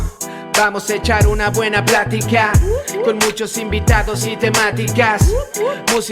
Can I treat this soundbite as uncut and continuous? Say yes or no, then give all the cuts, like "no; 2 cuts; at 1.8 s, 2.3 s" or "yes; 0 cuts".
yes; 0 cuts